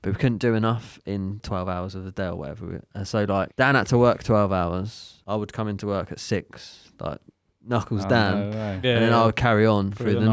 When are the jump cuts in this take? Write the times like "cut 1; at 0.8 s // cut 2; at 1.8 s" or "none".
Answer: cut 1; at 1.4 s // cut 2; at 3.5 s // cut 3; at 5.1 s